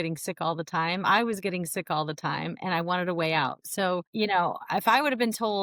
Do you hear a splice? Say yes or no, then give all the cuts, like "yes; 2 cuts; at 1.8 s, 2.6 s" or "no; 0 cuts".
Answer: no; 0 cuts